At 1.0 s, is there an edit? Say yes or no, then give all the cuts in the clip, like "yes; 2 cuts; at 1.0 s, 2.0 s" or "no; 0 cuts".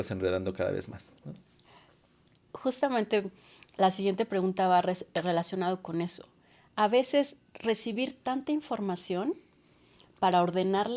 no; 0 cuts